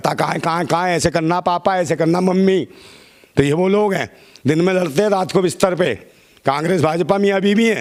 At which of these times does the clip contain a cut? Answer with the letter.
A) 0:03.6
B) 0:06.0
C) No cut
C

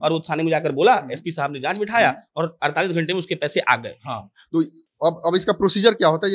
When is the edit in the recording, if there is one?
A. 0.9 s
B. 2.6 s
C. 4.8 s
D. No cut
D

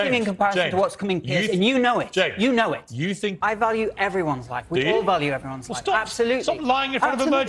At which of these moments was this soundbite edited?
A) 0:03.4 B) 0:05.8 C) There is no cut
A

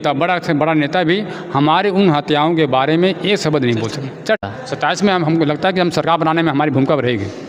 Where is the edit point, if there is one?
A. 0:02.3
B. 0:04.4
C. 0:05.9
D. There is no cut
B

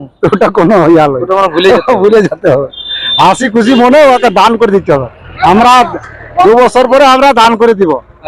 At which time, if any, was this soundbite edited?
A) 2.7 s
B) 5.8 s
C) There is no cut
C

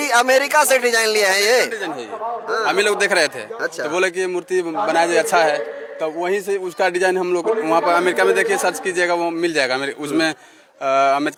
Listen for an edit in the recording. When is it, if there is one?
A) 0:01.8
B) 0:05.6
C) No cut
C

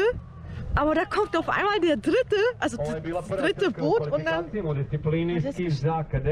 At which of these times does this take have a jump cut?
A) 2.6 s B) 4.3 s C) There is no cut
C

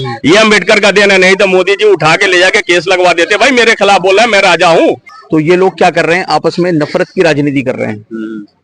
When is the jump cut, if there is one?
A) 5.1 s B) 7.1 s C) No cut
A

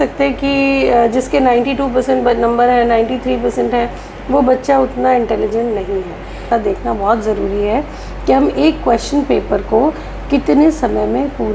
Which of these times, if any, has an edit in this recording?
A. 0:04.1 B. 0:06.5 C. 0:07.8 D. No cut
B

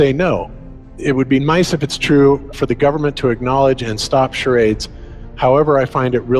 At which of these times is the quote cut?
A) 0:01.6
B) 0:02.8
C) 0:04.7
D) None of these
D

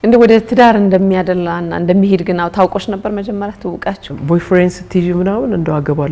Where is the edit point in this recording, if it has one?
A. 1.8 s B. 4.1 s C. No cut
B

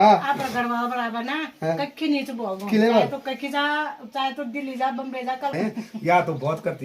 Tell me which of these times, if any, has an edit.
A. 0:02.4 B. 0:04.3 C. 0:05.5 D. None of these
C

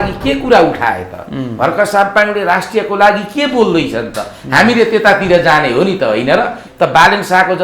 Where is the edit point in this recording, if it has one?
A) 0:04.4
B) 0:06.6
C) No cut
B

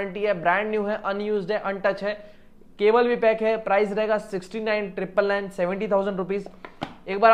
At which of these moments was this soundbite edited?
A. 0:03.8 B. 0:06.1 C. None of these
C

